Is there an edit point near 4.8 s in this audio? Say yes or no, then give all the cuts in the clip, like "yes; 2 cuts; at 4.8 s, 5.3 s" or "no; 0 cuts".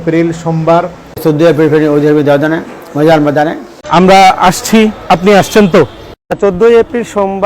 no; 1 cut; at 1.0 s